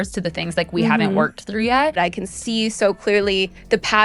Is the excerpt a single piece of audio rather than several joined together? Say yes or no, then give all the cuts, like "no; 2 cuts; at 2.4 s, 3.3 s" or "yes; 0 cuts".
no; 1 cut; at 2.0 s